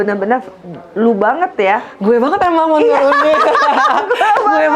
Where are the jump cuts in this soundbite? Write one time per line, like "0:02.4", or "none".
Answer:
none

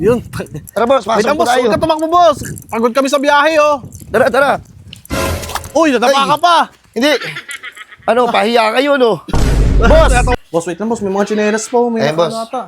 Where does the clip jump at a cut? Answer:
0:10.3

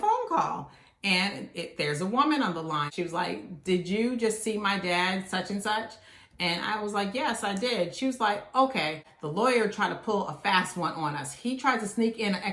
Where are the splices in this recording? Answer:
0:02.9
0:09.1

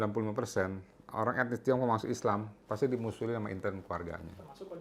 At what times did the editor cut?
none

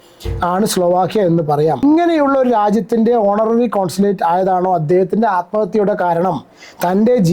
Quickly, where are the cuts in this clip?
0:01.8

